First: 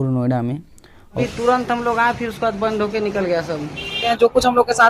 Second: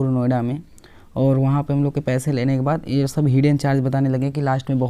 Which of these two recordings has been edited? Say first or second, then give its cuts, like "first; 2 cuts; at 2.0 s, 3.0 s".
first; 2 cuts; at 1.2 s, 4.0 s